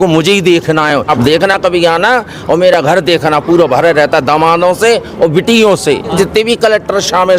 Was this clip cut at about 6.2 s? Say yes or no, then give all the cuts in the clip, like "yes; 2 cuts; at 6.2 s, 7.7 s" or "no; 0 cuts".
yes; 2 cuts; at 1.1 s, 6.2 s